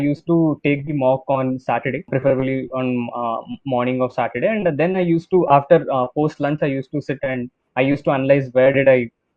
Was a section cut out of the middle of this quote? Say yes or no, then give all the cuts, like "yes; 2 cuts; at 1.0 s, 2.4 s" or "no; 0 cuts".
yes; 1 cut; at 2.1 s